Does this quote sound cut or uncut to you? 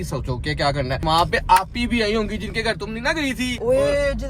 cut